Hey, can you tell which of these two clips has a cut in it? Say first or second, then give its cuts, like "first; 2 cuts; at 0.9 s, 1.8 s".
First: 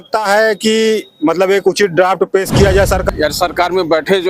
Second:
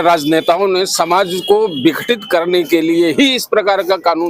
first; 1 cut; at 3.0 s